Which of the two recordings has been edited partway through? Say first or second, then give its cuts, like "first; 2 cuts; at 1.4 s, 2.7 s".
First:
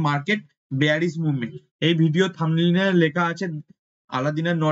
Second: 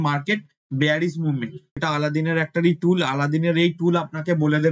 second; 1 cut; at 1.8 s